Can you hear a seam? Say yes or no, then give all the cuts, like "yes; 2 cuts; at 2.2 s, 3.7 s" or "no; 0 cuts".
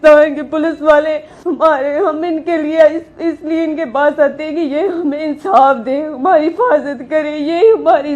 yes; 1 cut; at 1.3 s